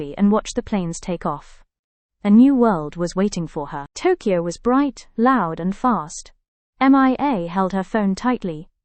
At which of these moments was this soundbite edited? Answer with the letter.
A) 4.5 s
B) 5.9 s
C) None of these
C